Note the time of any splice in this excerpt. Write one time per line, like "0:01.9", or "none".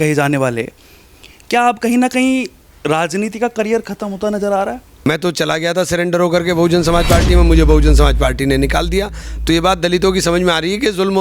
0:05.1